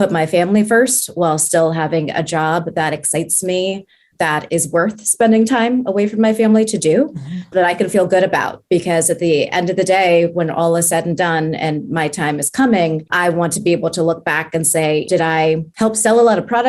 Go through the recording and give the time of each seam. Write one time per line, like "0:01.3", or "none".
0:04.1
0:13.1
0:15.3